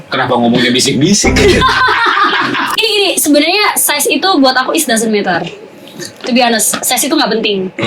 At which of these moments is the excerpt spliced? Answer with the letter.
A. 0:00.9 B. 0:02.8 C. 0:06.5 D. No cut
B